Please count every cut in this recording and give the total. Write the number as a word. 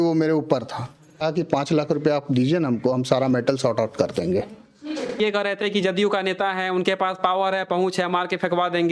two